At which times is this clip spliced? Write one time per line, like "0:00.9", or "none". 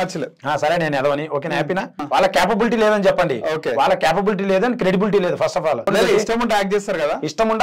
0:02.0
0:05.9